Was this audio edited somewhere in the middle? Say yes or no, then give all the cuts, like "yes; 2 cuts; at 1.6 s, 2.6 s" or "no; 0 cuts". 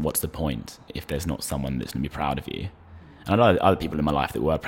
yes; 1 cut; at 0.9 s